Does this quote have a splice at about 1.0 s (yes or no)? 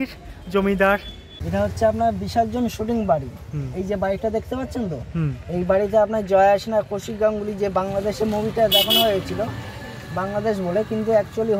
yes